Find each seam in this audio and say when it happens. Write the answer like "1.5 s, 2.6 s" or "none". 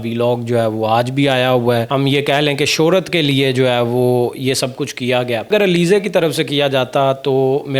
1.9 s, 5.5 s